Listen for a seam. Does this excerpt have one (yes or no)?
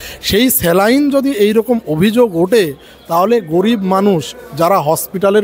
no